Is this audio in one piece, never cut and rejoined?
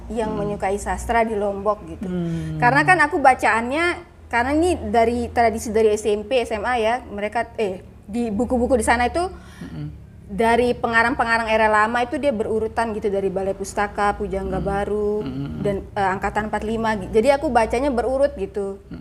yes; 0 cuts

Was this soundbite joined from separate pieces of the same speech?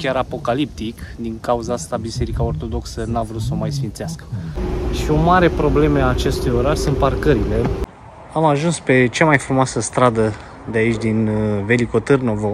yes; 2 cuts; at 4.7 s, 7.9 s

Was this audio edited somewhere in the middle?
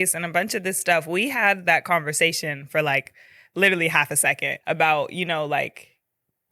no; 0 cuts

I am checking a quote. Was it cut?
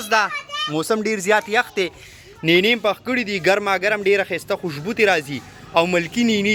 no; 0 cuts

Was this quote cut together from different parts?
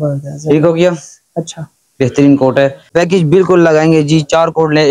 yes; 1 cut; at 2.8 s

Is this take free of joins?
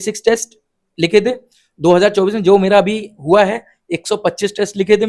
yes; 0 cuts

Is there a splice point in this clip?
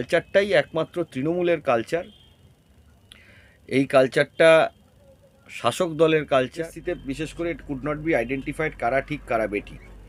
yes; 1 cut; at 6.7 s

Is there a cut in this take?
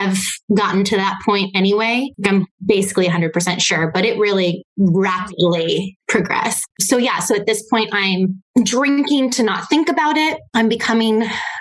yes; 1 cut; at 6.6 s

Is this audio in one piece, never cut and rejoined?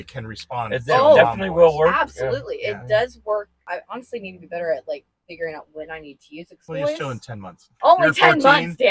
no; 3 cuts; at 3.6 s, 6.6 s, 7.7 s

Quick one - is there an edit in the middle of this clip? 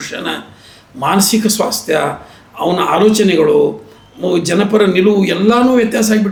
no; 0 cuts

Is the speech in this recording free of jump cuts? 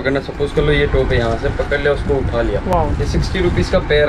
yes; 0 cuts

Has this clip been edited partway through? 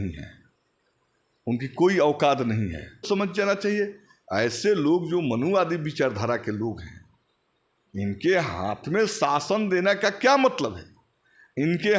yes; 1 cut; at 3.0 s

